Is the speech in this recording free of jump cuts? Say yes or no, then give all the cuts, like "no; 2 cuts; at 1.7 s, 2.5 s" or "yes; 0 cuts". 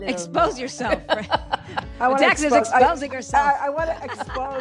yes; 0 cuts